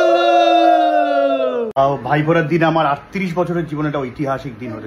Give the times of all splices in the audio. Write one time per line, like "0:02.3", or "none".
0:01.7